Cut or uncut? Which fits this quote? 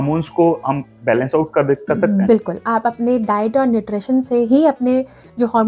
uncut